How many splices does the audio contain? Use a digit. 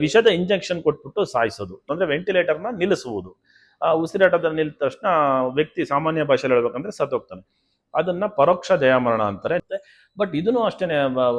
2